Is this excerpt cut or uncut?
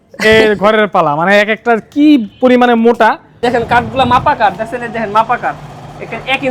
cut